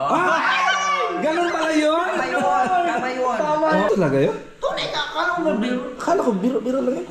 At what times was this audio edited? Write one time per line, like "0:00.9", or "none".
0:03.9